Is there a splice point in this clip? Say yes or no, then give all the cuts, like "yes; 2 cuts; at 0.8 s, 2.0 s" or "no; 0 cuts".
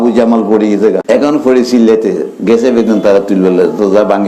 yes; 1 cut; at 1.0 s